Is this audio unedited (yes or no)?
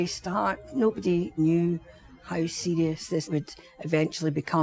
no